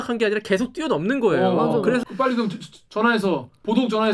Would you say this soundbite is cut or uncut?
cut